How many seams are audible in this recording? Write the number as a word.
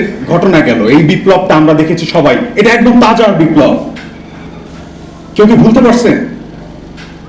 zero